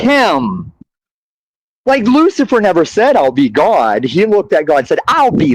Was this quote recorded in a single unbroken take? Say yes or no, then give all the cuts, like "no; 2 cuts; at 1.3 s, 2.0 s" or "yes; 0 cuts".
yes; 0 cuts